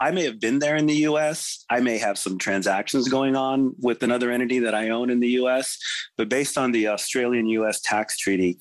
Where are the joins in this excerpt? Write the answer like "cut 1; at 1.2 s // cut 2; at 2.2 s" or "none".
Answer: none